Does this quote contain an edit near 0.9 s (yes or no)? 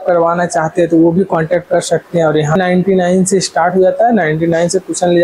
no